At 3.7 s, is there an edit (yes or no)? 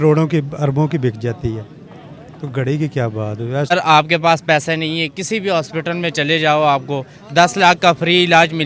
yes